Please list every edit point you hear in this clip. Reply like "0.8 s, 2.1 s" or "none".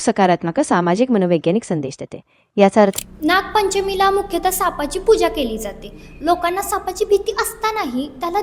3.0 s